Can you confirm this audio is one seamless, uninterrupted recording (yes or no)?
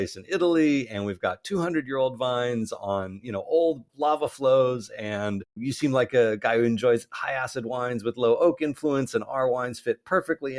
no